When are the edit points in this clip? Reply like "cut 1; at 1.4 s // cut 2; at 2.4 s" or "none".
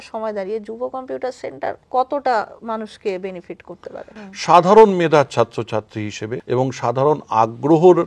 cut 1; at 1.8 s // cut 2; at 4.1 s // cut 3; at 6.3 s